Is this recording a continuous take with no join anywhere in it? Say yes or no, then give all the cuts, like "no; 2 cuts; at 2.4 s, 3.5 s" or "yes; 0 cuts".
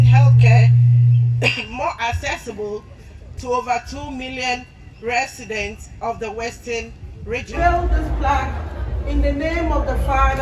no; 1 cut; at 7.5 s